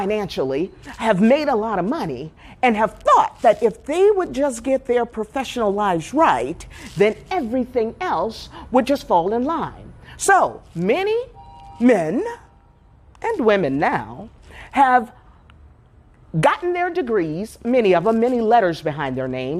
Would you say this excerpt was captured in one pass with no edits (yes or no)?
yes